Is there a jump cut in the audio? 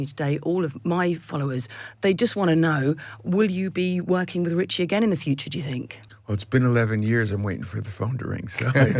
no; 0 cuts

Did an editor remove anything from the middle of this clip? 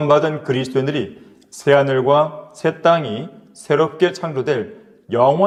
no; 0 cuts

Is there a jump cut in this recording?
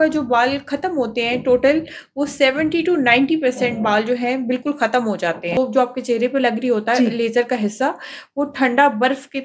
yes; 1 cut; at 5.6 s

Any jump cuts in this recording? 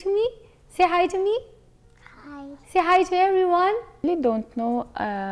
yes; 1 cut; at 4.0 s

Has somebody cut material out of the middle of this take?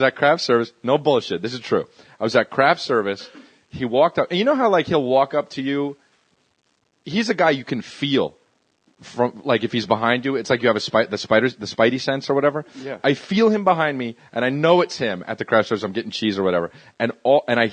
yes; 1 cut; at 3.5 s

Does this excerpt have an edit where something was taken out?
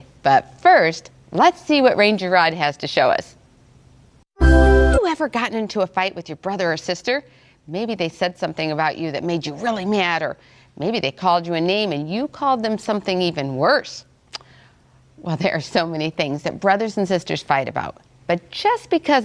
no; 0 cuts

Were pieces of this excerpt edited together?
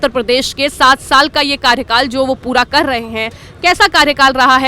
no; 0 cuts

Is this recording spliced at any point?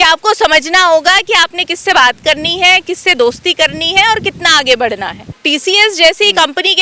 yes; 1 cut; at 5.3 s

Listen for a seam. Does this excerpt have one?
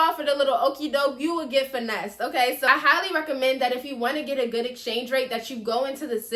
yes; 1 cut; at 2.4 s

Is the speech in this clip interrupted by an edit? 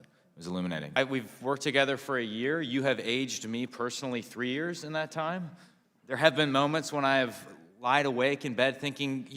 yes; 1 cut; at 0.9 s

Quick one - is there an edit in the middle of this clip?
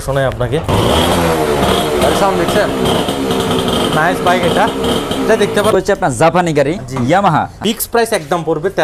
yes; 2 cuts; at 5.8 s, 7.6 s

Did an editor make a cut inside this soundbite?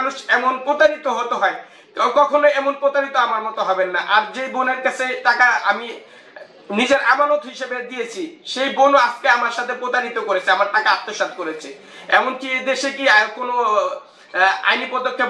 no; 0 cuts

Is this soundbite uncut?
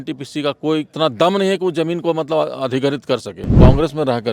no; 2 cuts; at 0.9 s, 3.5 s

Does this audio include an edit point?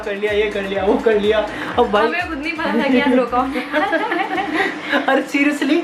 no; 0 cuts

